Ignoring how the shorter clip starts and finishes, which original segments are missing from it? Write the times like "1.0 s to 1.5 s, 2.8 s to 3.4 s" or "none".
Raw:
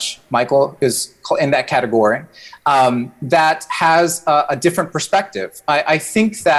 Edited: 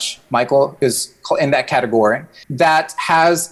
2.4 s to 3.1 s